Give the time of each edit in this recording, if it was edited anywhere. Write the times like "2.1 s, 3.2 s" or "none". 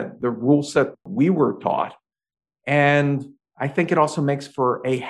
1.1 s